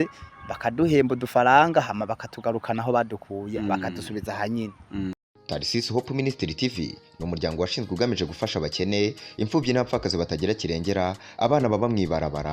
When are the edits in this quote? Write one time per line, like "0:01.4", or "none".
0:05.3

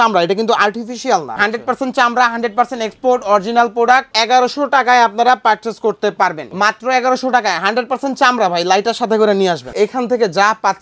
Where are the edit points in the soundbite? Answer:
0:01.3
0:04.1
0:06.4
0:09.7

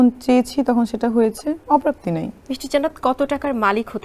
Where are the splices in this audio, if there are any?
0:02.4

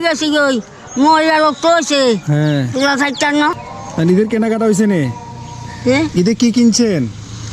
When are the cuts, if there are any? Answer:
none

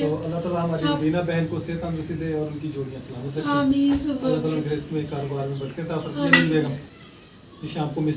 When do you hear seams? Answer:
0:06.1

